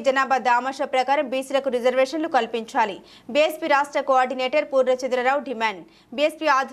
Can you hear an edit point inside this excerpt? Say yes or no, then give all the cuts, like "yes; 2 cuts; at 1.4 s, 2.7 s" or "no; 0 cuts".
no; 0 cuts